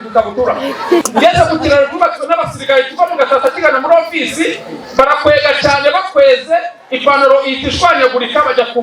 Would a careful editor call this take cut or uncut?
cut